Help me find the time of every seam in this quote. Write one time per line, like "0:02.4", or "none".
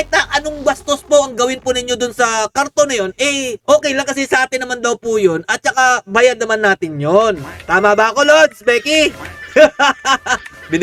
none